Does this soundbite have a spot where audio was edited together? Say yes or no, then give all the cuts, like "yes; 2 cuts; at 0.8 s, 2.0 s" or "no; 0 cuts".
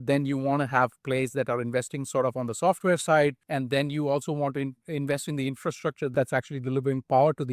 yes; 2 cuts; at 3.4 s, 6.1 s